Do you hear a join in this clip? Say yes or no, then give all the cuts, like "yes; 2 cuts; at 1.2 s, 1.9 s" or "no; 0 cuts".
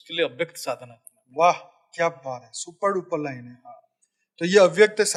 no; 0 cuts